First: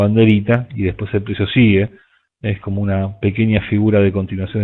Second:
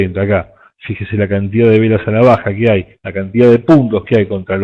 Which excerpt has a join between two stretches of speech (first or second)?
second